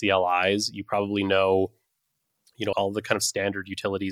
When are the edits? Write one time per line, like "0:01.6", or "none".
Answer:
0:02.7